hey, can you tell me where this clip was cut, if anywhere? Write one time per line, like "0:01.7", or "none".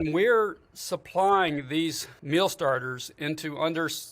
0:02.1